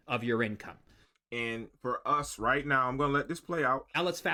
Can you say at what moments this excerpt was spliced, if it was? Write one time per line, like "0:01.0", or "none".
none

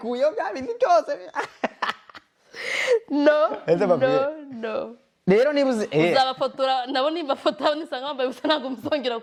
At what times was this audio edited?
none

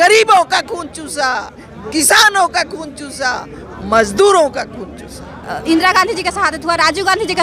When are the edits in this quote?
0:05.5

